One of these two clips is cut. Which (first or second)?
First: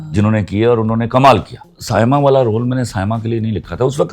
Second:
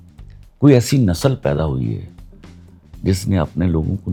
first